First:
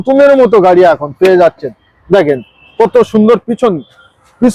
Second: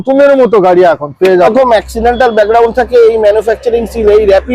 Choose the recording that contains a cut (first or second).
second